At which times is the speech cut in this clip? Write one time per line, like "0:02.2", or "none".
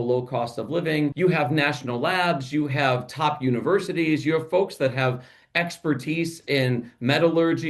0:01.1